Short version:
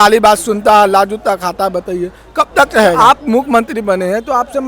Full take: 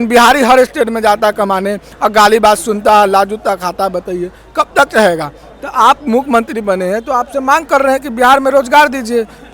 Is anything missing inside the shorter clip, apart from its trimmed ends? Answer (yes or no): yes